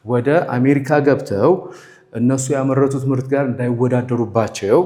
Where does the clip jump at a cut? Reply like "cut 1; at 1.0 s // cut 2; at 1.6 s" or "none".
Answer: none